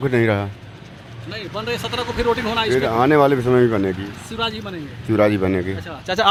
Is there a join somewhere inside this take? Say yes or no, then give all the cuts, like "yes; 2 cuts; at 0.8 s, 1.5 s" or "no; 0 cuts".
no; 0 cuts